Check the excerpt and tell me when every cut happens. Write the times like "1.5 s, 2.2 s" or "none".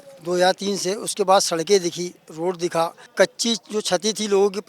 3.0 s